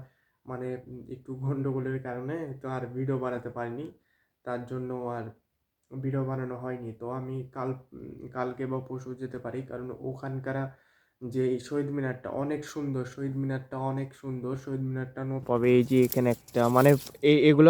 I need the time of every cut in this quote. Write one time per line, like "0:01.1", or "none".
0:15.5